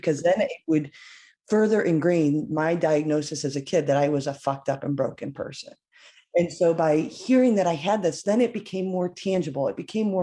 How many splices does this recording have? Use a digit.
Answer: 0